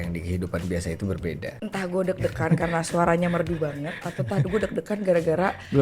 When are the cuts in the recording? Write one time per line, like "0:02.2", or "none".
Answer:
0:01.6

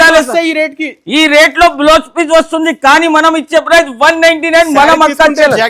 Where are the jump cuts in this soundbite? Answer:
none

